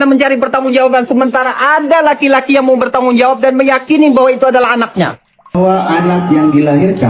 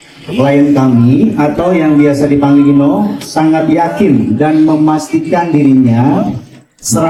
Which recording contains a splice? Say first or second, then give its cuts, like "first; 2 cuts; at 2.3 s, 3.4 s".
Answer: first; 1 cut; at 5.5 s